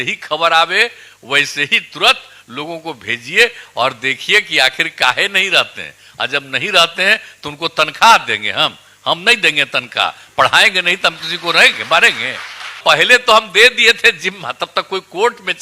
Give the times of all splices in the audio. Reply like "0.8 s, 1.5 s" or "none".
12.8 s